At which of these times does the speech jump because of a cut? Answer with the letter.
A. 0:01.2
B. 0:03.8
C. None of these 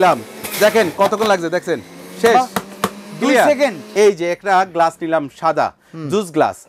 B